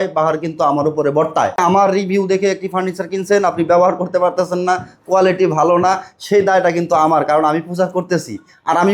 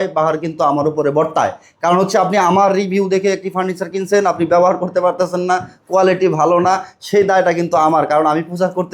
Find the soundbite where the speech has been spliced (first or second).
first